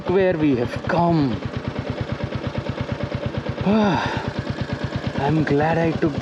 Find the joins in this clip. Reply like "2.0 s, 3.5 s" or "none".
none